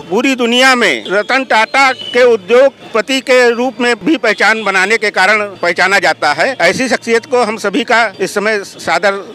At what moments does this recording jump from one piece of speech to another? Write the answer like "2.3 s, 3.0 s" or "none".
1.0 s, 2.0 s, 2.8 s, 4.0 s, 5.5 s, 6.5 s, 8.1 s